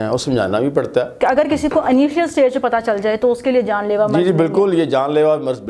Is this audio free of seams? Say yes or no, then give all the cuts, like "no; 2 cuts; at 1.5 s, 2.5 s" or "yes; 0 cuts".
no; 1 cut; at 1.1 s